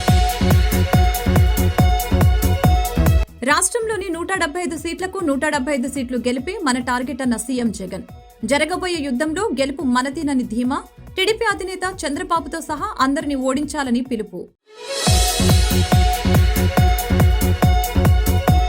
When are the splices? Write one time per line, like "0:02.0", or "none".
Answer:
none